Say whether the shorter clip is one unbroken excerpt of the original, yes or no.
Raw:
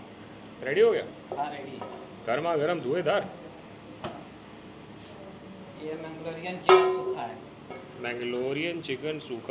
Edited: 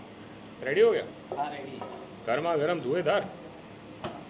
yes